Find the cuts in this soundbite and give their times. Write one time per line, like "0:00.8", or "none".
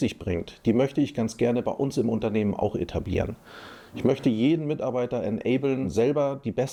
none